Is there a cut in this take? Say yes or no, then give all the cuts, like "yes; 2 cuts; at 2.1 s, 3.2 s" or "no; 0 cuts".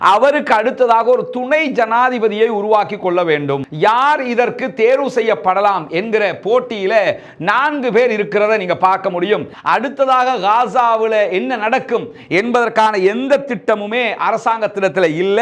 yes; 2 cuts; at 3.7 s, 9.5 s